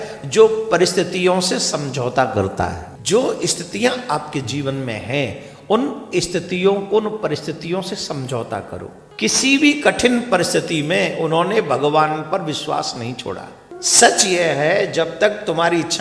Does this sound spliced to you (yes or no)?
yes